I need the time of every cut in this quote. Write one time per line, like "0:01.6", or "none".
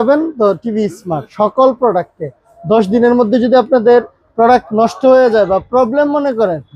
0:01.3

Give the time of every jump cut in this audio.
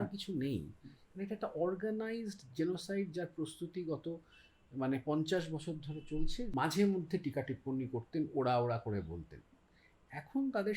0:06.4

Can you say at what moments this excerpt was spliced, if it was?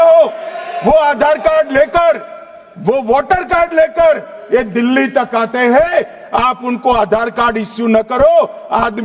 none

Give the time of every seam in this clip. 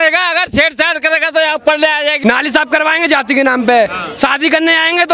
0:02.2

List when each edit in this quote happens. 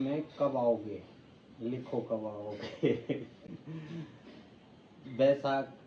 none

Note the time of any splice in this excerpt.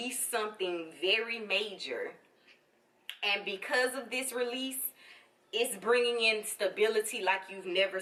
none

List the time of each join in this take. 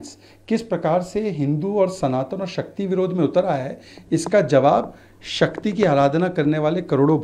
none

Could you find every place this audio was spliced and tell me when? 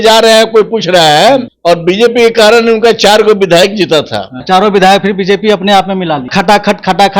0:01.5
0:04.3
0:06.3

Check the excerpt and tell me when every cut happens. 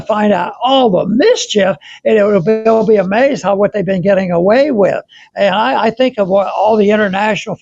none

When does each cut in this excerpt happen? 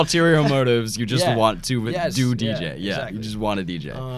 none

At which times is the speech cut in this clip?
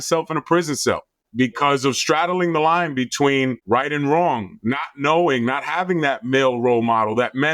0:01.2
0:03.6

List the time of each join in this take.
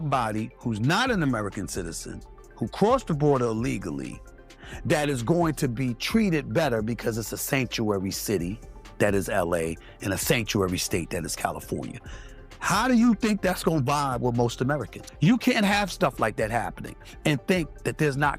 0:12.1
0:15.0

